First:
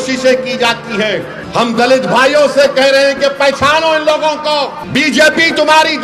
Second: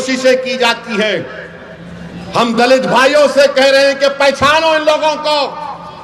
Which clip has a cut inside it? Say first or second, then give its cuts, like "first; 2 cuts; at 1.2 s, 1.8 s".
first; 2 cuts; at 1.4 s, 4.8 s